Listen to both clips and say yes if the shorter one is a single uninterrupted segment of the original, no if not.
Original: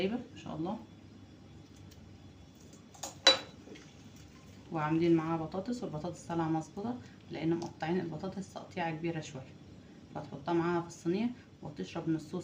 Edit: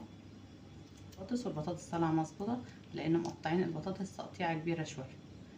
no